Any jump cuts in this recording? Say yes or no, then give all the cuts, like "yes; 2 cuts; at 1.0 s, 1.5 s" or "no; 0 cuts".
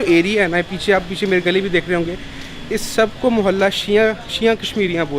no; 0 cuts